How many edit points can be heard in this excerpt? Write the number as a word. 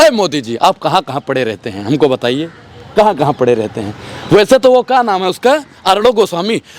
zero